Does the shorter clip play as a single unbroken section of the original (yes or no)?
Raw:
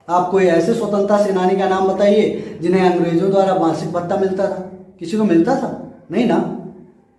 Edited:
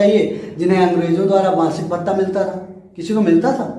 yes